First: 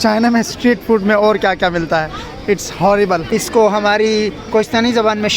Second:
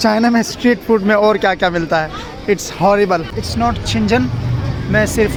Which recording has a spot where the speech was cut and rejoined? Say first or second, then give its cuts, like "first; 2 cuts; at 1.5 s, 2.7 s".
first; 1 cut; at 3.2 s